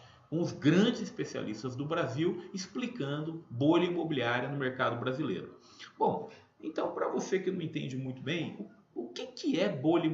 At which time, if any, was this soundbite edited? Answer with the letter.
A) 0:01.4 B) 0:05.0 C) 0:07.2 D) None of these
B